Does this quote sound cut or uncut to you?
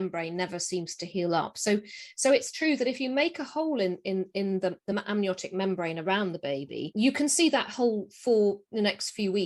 uncut